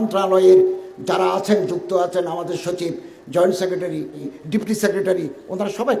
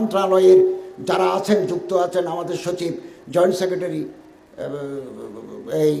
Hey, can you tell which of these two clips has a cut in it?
first; 1 cut; at 4.3 s

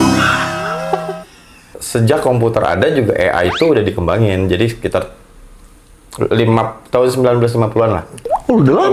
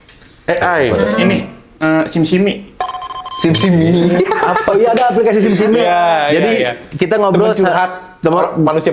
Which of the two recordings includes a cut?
first; 1 cut; at 1.7 s

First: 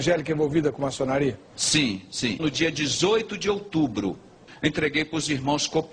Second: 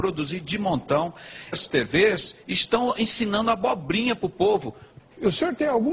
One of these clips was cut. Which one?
first; 1 cut; at 4.5 s

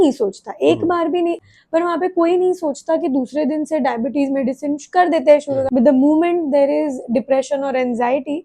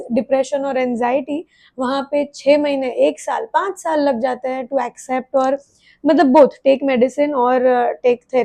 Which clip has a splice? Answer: first; 2 cuts; at 1.4 s, 5.7 s

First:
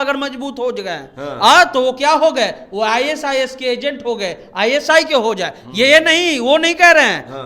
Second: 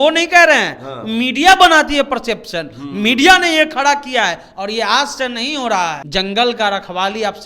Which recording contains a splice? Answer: second; 1 cut; at 6.0 s

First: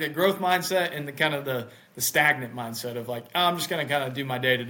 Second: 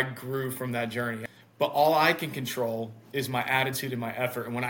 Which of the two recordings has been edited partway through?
second; 1 cut; at 1.2 s

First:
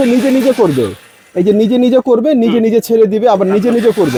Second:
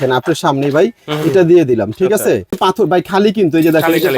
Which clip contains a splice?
second; 1 cut; at 2.5 s

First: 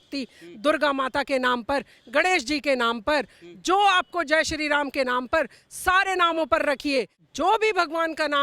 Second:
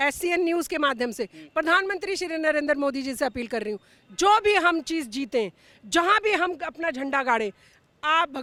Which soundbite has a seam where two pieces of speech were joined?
first; 1 cut; at 7.2 s

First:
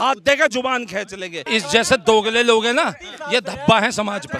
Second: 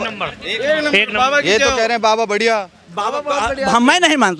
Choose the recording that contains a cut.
first; 1 cut; at 1.4 s

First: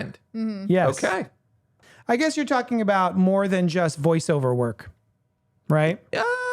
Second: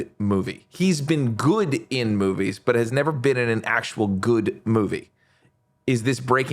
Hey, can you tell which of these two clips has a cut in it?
first; 1 cut; at 1.9 s

